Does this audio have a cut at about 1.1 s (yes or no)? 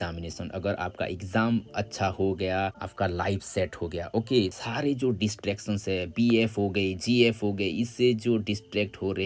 no